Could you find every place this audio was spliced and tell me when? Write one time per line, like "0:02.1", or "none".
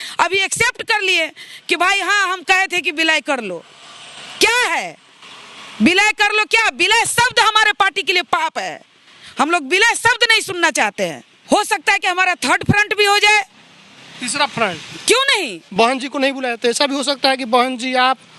0:11.3
0:15.6